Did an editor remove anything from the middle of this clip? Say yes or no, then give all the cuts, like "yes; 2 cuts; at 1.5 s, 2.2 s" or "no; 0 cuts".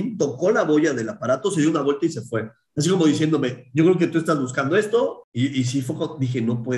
yes; 1 cut; at 5.2 s